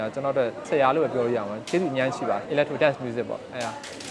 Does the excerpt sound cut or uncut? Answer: cut